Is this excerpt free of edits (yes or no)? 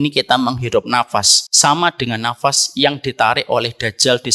no